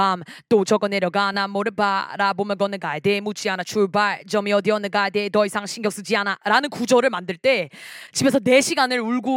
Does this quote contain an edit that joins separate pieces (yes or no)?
no